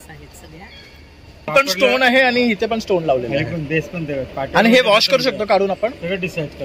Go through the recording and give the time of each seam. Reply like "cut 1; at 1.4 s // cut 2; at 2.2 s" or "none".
cut 1; at 1.5 s

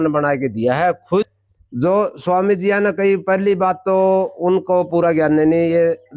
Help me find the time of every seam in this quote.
cut 1; at 1.3 s

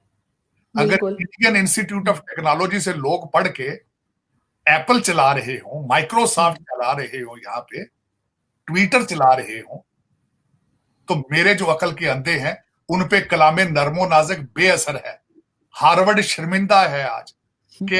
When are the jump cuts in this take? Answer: none

